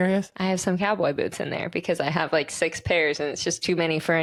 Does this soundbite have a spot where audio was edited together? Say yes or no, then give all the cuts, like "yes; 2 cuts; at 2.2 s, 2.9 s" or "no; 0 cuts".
no; 0 cuts